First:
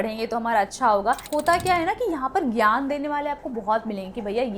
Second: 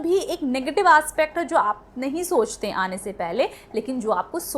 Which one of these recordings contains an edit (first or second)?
first